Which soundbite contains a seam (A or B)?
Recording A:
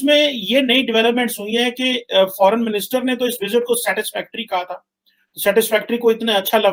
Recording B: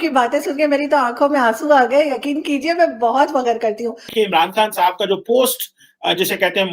B